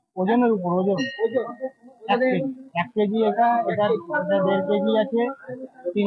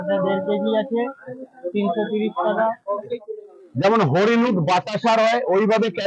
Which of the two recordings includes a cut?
second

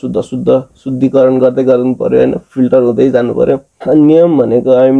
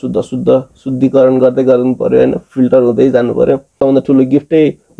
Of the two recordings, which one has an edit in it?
second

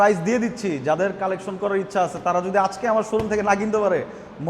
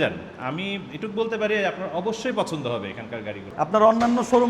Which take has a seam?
second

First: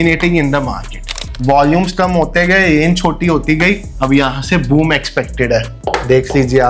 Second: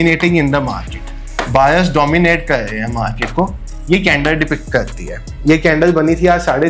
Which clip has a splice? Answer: first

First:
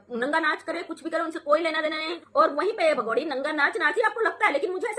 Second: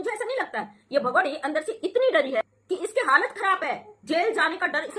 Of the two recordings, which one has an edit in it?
first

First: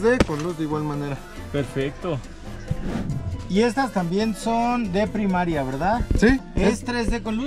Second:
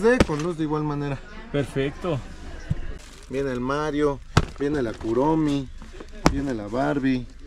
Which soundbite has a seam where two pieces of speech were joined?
second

